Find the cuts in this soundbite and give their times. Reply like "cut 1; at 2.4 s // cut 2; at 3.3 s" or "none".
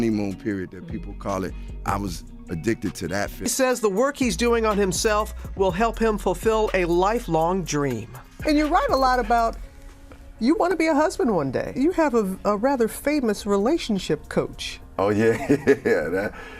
cut 1; at 3.3 s